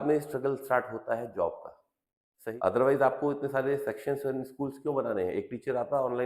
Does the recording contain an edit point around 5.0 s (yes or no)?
no